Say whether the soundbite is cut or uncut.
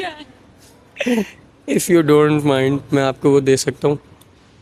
uncut